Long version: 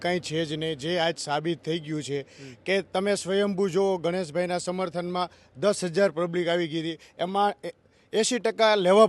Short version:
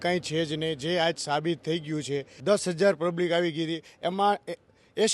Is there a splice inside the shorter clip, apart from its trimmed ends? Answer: yes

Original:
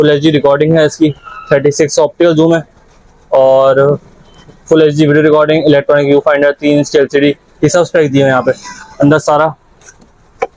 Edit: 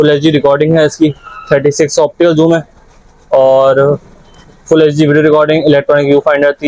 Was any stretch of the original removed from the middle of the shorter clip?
no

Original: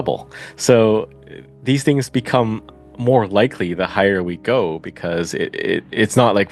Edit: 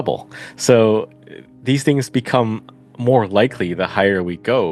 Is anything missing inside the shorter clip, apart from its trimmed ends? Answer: no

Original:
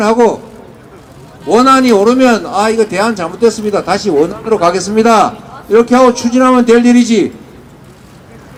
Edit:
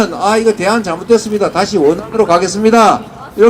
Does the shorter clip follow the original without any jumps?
yes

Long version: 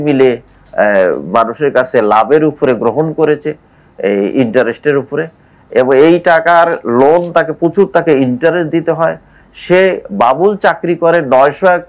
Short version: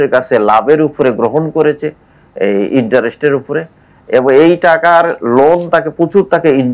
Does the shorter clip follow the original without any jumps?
yes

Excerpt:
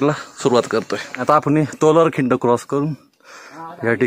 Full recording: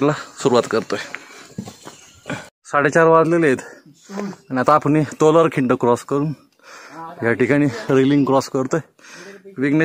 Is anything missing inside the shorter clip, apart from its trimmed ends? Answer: yes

